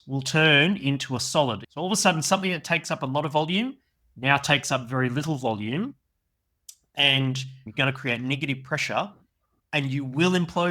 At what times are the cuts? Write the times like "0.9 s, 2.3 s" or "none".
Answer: 1.7 s, 7.7 s